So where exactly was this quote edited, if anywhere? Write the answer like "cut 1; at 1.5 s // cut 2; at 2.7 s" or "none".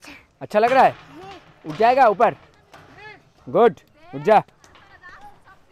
none

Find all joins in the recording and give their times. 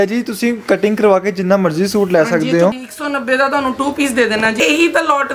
cut 1; at 2.7 s // cut 2; at 4.6 s

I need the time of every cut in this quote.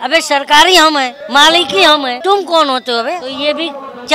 cut 1; at 1.2 s // cut 2; at 2.1 s // cut 3; at 3.3 s

